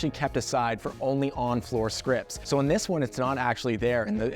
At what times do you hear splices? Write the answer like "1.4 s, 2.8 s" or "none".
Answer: 2.3 s